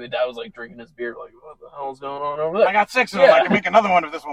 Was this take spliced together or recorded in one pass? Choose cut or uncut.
uncut